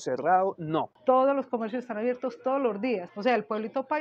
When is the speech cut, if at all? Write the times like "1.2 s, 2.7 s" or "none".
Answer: 0.9 s